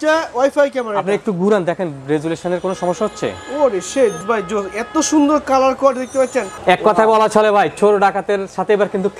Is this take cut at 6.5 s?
yes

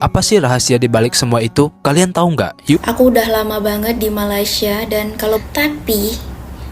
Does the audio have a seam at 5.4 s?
yes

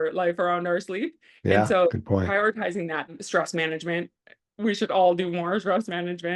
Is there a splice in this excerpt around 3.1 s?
yes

